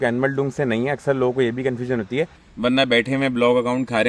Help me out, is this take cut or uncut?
cut